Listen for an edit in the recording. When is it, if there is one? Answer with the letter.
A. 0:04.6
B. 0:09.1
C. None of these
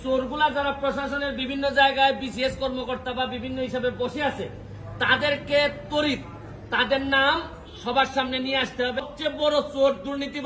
B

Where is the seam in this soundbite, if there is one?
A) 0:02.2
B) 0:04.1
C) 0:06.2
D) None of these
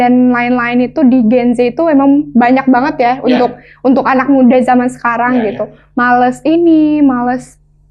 D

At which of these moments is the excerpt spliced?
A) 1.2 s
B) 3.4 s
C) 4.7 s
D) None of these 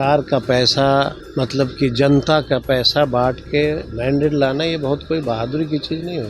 A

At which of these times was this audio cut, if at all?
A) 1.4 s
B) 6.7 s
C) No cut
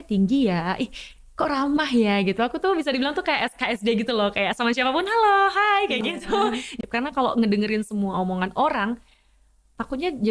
B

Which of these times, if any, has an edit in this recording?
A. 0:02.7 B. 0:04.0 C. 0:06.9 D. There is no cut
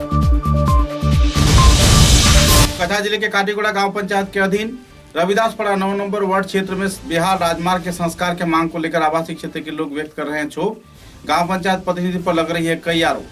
D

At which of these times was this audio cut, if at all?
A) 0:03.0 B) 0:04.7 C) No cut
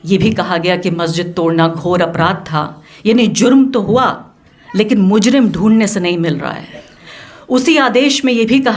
C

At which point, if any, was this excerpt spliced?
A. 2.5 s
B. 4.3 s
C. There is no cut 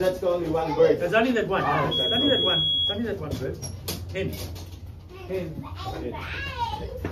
C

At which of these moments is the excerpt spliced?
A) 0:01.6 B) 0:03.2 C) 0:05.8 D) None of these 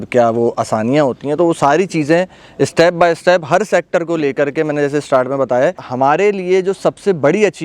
C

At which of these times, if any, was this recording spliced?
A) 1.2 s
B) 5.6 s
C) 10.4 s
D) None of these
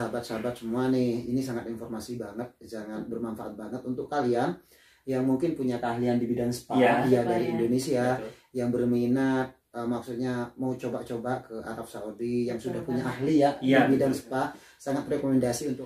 D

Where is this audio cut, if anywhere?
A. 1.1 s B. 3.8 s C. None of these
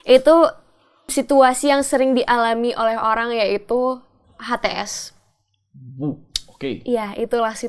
A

